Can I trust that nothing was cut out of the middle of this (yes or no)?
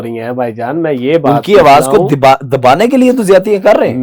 yes